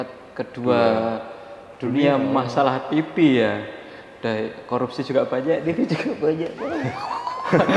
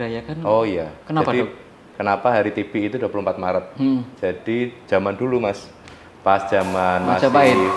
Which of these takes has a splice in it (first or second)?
second